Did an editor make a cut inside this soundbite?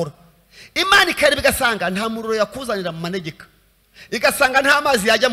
no; 0 cuts

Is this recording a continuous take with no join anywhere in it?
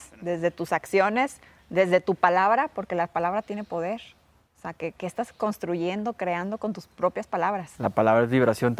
yes; 0 cuts

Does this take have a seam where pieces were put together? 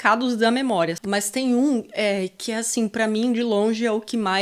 yes; 1 cut; at 1.0 s

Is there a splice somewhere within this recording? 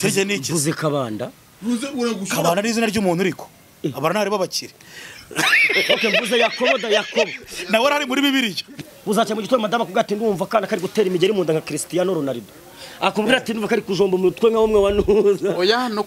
yes; 1 cut; at 8.8 s

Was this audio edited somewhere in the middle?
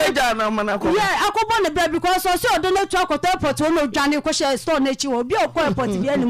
no; 0 cuts

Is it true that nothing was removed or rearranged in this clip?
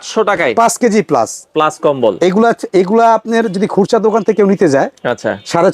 yes; 0 cuts

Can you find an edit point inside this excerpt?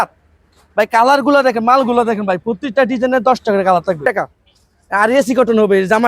yes; 1 cut; at 4.0 s

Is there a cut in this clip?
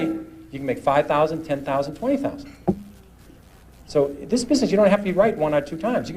no; 0 cuts

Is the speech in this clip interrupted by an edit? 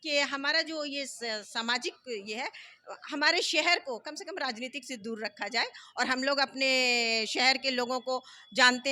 no; 0 cuts

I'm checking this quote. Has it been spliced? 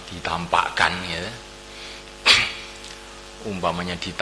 no; 0 cuts

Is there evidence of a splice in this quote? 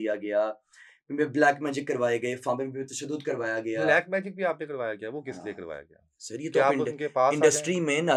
no; 0 cuts

